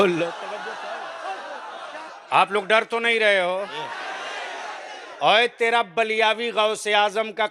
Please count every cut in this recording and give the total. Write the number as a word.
one